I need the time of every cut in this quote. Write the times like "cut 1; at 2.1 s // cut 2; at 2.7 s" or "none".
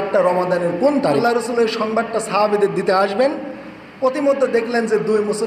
cut 1; at 1.2 s